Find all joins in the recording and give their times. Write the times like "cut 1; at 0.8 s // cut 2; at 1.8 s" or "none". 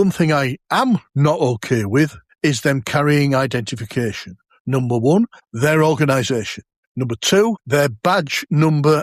none